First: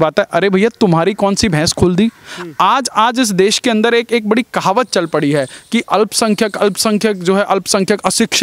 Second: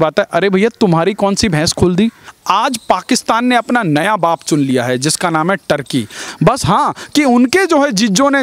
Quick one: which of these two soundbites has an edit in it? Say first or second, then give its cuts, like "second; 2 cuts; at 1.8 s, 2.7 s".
second; 2 cuts; at 2.3 s, 6.2 s